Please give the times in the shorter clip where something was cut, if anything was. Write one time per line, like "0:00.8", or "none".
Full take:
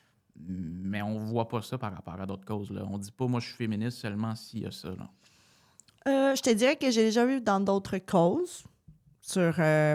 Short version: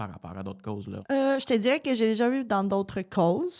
0:01.0